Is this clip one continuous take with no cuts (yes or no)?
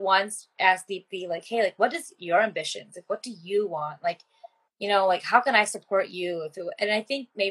yes